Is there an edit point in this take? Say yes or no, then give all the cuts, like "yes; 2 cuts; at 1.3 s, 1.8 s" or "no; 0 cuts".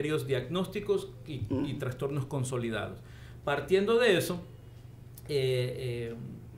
no; 0 cuts